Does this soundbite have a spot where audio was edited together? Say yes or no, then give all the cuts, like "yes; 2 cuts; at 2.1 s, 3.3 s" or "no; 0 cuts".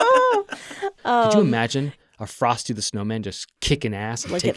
yes; 1 cut; at 1.4 s